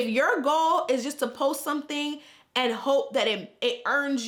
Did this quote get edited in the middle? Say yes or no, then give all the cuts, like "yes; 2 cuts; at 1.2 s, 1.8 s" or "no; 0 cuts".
no; 0 cuts